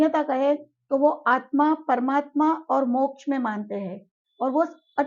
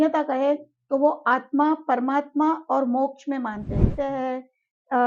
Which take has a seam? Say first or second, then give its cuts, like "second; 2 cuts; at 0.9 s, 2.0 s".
second; 1 cut; at 3.9 s